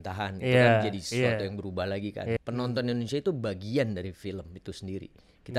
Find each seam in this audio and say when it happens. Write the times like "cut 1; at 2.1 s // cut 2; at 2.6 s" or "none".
cut 1; at 2.4 s